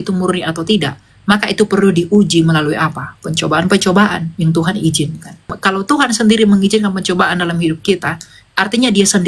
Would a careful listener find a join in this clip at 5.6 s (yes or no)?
yes